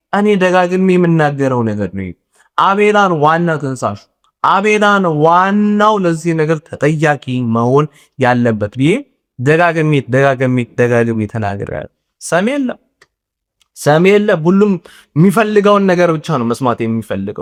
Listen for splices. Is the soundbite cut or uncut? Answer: uncut